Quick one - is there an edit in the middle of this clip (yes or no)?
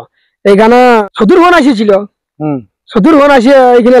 yes